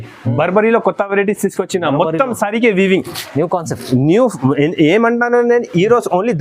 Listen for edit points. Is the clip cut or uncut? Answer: uncut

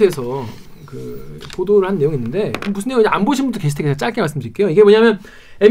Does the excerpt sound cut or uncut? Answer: uncut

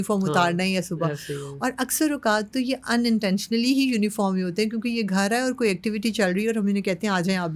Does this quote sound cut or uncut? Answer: uncut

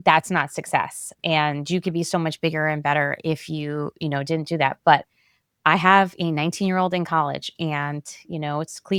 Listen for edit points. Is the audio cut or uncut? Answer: uncut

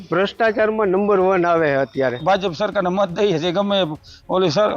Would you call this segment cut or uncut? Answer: cut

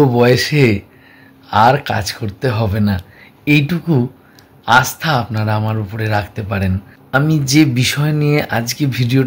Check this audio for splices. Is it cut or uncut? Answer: cut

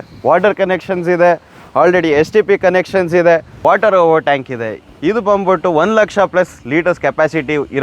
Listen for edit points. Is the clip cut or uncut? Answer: cut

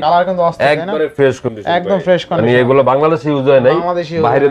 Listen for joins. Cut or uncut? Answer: uncut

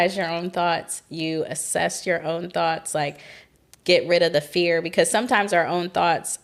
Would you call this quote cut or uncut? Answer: uncut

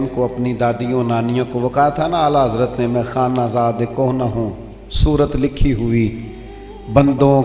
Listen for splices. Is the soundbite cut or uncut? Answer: uncut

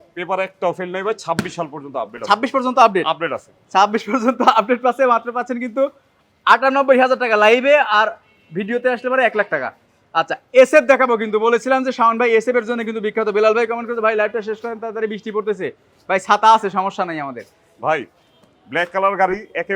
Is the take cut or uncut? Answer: uncut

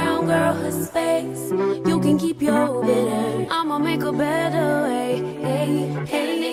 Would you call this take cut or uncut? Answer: uncut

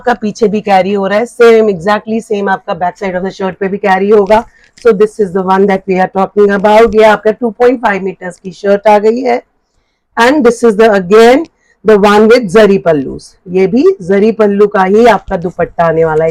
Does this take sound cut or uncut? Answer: uncut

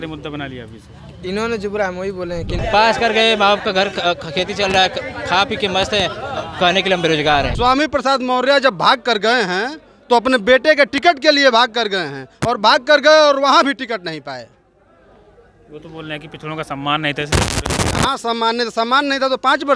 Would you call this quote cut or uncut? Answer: cut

